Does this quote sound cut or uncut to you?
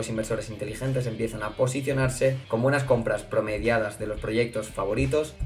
uncut